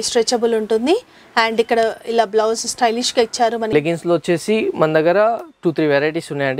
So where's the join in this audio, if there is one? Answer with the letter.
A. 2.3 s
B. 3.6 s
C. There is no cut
B